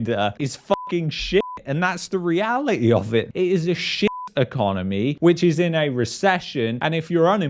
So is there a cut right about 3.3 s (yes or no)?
yes